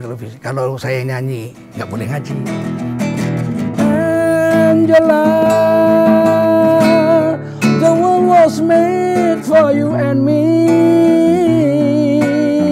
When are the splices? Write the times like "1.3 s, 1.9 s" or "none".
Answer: 2.3 s